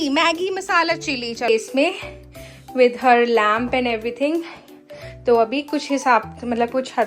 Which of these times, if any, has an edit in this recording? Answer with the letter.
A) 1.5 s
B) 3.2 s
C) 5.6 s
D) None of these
A